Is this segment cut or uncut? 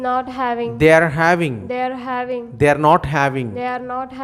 uncut